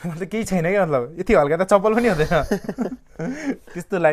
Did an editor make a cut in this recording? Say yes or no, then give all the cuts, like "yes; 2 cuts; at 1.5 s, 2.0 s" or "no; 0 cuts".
no; 0 cuts